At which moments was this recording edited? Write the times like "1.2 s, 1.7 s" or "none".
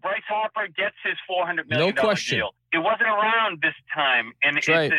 2.6 s